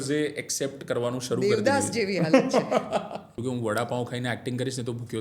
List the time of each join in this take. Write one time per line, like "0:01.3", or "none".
0:03.4